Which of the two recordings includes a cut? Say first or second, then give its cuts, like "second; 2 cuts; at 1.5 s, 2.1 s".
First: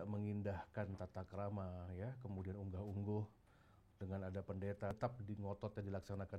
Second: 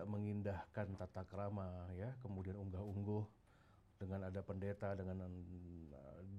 first; 1 cut; at 4.9 s